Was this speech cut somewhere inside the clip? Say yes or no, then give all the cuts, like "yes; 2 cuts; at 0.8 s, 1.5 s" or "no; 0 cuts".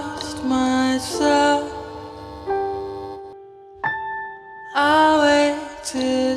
no; 0 cuts